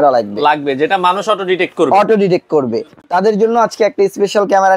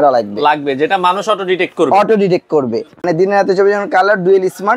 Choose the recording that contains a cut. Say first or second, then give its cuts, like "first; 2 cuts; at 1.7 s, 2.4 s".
second; 1 cut; at 3.0 s